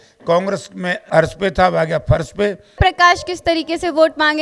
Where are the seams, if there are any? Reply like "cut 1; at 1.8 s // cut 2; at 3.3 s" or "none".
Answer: cut 1; at 1.0 s // cut 2; at 2.8 s

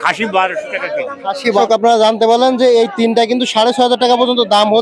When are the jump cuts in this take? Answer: cut 1; at 1.6 s

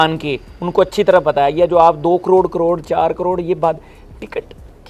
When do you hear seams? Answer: none

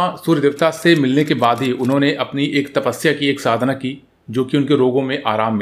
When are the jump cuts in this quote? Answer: none

